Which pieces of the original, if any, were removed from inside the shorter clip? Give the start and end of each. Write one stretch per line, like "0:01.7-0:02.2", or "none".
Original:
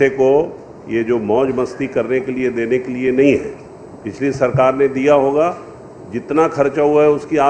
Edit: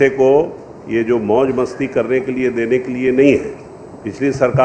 none